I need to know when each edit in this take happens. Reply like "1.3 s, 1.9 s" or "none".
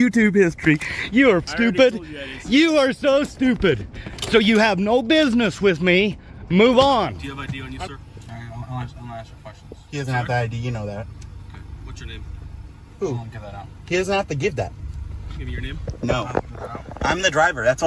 7.2 s

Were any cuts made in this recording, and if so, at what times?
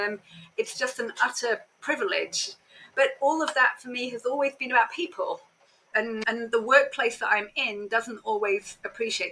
5.9 s

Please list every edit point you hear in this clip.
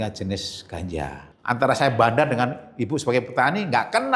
1.3 s

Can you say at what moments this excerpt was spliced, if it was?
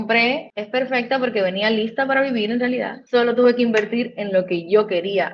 none

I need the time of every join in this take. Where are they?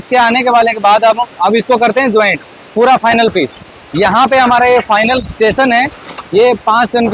6.1 s

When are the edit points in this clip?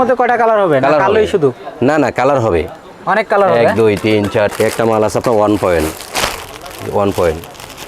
4.5 s

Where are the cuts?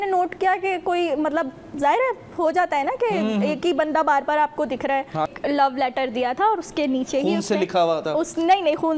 5.3 s

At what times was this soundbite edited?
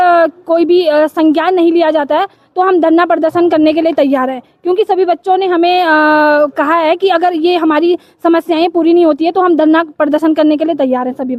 none

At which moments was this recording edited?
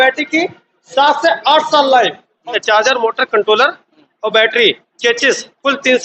2.4 s

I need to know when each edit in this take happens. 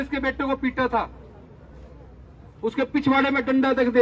none

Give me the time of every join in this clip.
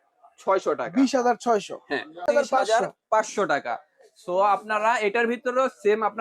2.3 s

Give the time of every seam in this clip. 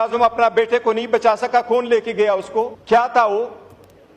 2.8 s

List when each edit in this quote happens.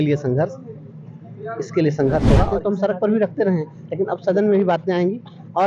2.5 s

